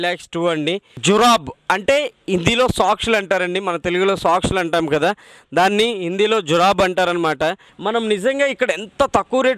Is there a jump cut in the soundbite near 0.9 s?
yes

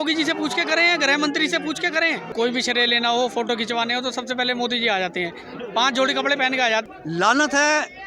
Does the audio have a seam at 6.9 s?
yes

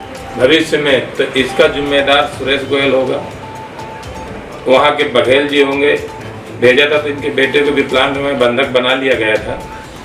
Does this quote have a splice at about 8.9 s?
no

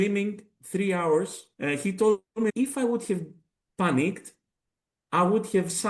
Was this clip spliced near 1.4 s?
yes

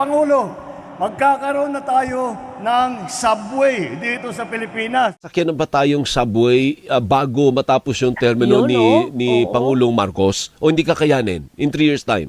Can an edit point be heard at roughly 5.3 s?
yes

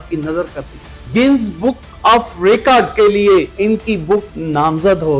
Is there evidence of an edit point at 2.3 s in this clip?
no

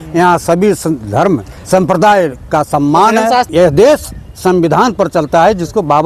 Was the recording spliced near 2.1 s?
no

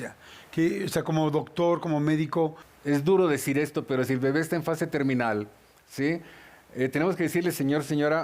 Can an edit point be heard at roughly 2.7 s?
yes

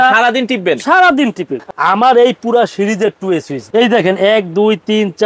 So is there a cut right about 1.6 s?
yes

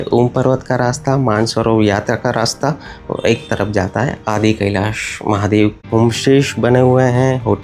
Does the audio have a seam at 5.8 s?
yes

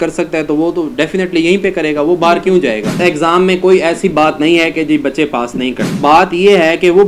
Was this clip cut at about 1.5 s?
no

